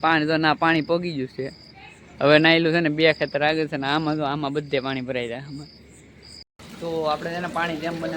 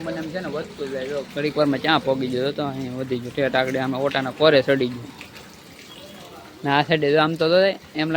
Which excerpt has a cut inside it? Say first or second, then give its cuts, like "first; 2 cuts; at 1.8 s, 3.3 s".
first; 1 cut; at 6.4 s